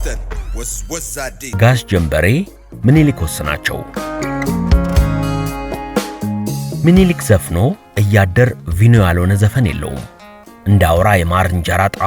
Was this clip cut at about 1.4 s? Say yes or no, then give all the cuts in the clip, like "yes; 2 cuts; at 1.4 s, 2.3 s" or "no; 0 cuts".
yes; 1 cut; at 1.4 s